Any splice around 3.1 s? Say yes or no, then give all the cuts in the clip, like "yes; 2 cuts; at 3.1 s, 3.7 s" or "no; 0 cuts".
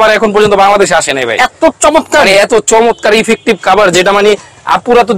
no; 0 cuts